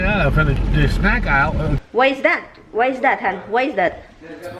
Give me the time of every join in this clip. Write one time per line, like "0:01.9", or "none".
0:01.8